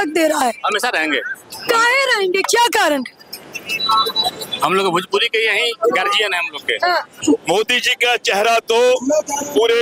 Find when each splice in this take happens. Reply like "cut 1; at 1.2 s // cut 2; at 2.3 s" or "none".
cut 1; at 7.1 s

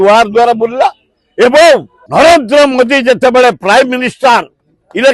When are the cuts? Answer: cut 1; at 2.0 s

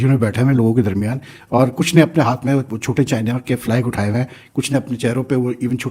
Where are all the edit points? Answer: none

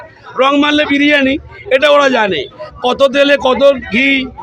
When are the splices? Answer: none

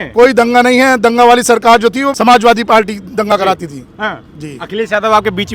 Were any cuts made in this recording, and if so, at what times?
cut 1; at 2.1 s

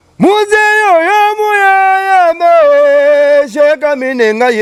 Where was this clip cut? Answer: none

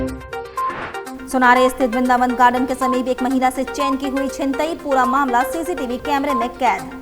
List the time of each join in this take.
cut 1; at 1.0 s

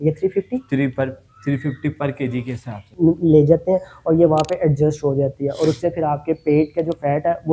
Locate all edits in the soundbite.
cut 1; at 2.9 s

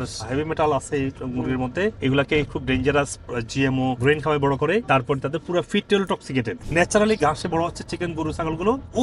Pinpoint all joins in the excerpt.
cut 1; at 6.7 s

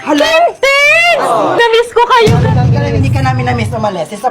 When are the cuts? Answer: cut 1; at 1.6 s

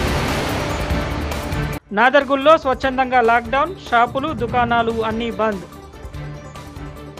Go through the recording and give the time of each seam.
cut 1; at 1.8 s

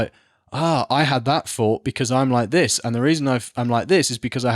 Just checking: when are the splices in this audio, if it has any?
none

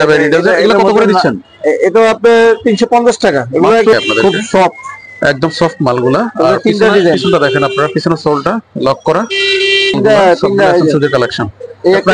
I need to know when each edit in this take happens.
cut 1; at 3.9 s // cut 2; at 10.0 s

